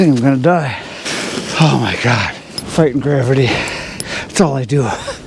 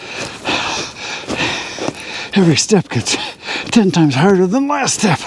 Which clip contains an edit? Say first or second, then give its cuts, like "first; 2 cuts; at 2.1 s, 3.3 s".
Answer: first; 2 cuts; at 1.0 s, 2.5 s